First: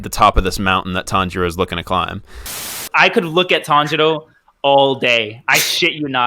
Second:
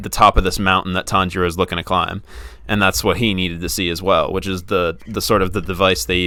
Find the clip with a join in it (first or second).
first